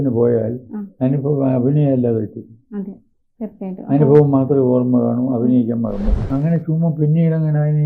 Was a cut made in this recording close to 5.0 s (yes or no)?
no